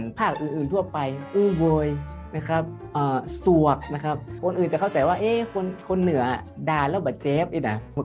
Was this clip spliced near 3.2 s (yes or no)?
no